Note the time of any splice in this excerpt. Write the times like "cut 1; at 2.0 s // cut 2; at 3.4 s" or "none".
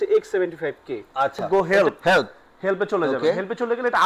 cut 1; at 1.4 s